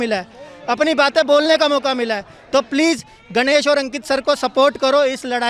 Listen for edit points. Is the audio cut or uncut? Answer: uncut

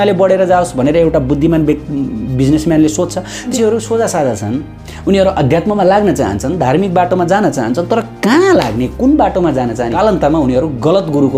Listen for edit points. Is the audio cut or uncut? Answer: cut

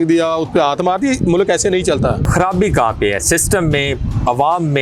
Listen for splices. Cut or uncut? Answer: cut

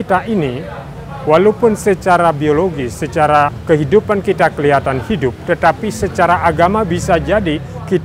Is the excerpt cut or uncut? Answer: cut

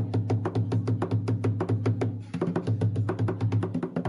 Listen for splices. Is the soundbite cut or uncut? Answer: cut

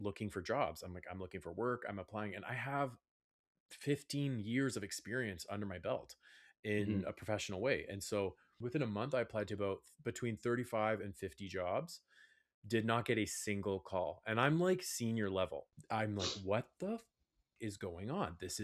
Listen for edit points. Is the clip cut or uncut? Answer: uncut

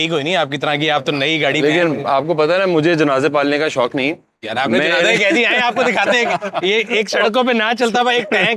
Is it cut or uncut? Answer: uncut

